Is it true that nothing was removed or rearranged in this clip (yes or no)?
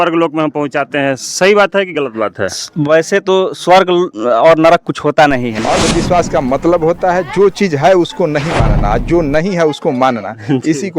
no